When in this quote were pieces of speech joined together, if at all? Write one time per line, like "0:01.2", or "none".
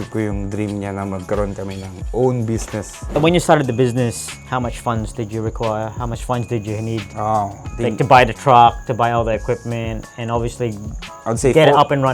0:03.0